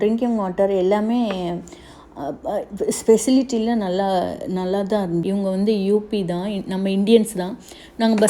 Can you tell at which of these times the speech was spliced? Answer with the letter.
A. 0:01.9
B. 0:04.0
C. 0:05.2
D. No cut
C